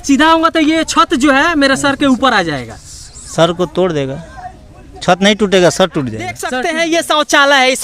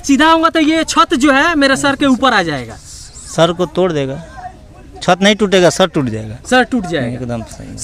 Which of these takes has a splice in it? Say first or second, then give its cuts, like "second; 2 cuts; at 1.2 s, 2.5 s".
first; 1 cut; at 6.4 s